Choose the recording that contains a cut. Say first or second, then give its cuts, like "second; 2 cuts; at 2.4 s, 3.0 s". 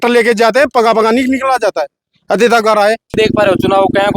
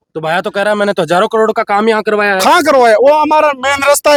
first; 1 cut; at 3.2 s